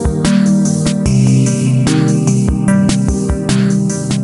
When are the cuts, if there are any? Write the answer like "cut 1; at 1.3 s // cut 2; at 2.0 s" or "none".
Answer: none